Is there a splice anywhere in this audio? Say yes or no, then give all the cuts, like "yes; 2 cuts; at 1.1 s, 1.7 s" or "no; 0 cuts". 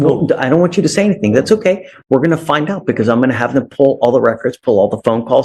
no; 0 cuts